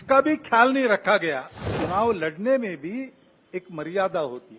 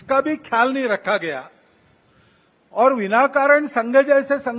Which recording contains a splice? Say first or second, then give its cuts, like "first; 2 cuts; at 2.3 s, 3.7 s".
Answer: first; 1 cut; at 1.7 s